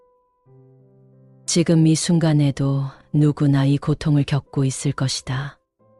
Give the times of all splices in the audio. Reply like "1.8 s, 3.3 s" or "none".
none